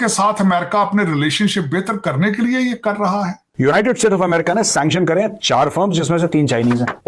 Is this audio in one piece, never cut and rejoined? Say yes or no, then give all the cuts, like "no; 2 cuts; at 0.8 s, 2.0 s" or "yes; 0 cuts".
no; 1 cut; at 3.4 s